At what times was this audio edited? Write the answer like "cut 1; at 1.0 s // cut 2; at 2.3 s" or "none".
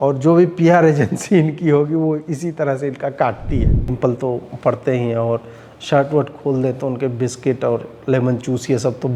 cut 1; at 4.0 s